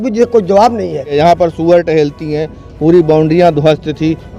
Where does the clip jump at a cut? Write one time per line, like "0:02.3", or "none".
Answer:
0:01.1